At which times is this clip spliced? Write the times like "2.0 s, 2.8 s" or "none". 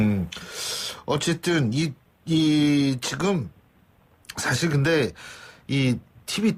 none